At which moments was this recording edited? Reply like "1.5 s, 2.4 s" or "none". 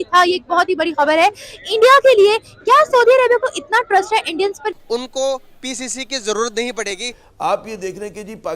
4.7 s, 7.2 s